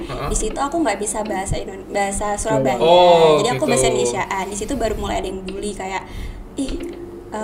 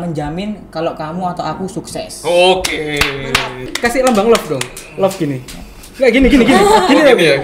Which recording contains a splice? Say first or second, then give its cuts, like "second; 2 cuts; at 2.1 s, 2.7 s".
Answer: second; 1 cut; at 3.6 s